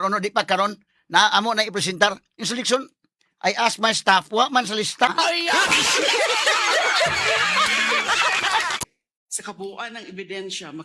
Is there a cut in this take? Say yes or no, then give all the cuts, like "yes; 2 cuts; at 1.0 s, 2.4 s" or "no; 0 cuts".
yes; 3 cuts; at 2.3 s, 5.1 s, 8.8 s